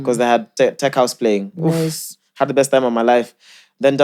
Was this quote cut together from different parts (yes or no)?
no